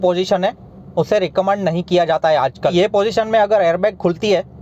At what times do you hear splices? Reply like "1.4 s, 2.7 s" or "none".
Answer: 2.7 s